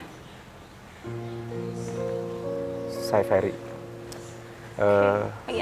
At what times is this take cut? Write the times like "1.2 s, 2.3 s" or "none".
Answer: 1.0 s, 3.1 s